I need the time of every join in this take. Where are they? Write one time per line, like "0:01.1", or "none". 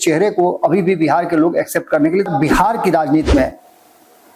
0:02.3